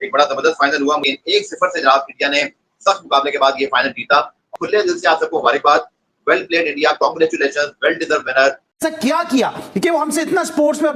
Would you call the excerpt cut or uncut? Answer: cut